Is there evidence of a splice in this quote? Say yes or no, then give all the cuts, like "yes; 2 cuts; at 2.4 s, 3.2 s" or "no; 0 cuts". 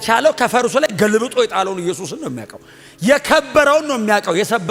no; 0 cuts